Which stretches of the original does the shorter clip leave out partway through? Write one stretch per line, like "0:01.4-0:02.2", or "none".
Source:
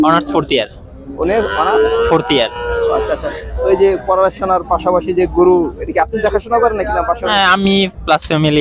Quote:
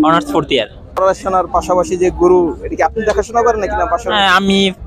0:01.0-0:04.2